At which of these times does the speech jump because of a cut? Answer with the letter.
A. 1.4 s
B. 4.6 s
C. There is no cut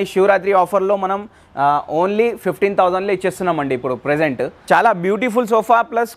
B